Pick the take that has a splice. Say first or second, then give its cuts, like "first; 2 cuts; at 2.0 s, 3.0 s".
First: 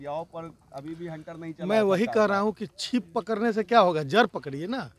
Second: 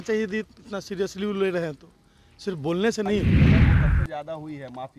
second; 1 cut; at 3.2 s